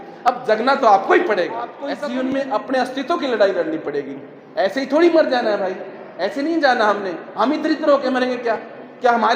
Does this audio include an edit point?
yes; 1 cut; at 1.8 s

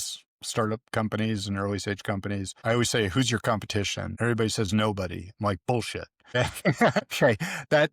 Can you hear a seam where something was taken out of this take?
yes; 4 cuts; at 2.5 s, 4.0 s, 6.3 s, 7.0 s

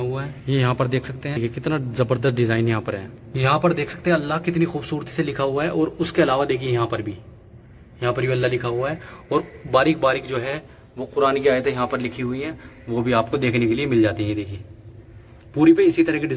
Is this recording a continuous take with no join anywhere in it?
yes; 0 cuts

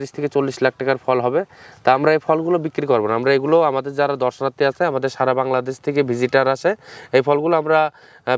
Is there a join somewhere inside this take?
no; 0 cuts

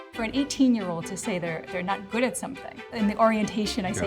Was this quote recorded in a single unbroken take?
no; 1 cut; at 2.8 s

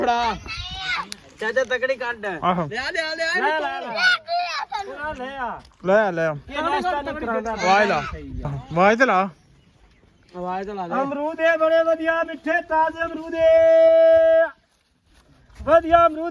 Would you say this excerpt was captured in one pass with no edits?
no; 1 cut; at 8.6 s

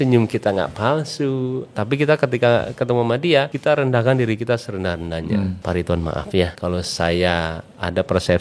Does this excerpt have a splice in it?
yes; 4 cuts; at 1.7 s, 3.5 s, 5.6 s, 6.6 s

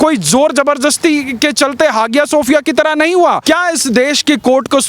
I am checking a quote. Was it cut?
yes; 1 cut; at 3.4 s

